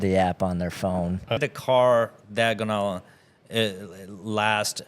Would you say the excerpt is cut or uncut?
cut